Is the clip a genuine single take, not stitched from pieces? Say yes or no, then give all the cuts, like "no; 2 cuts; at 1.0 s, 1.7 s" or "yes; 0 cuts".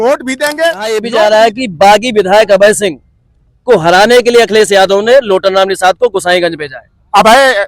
no; 1 cut; at 1.0 s